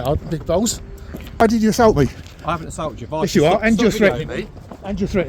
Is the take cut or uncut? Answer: cut